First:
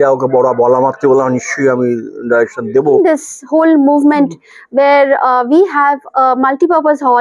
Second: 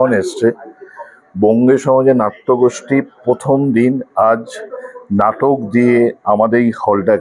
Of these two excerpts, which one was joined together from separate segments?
first; 1 cut; at 2.9 s

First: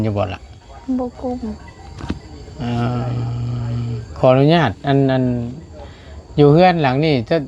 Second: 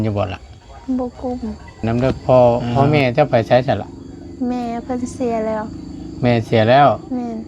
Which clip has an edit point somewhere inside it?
second; 1 cut; at 1.8 s

